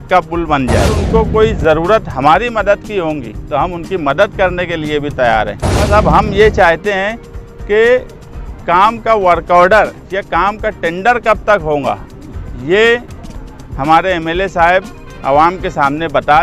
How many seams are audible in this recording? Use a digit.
2